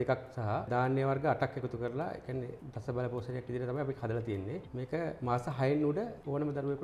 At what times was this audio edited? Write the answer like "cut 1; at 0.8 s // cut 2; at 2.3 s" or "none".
none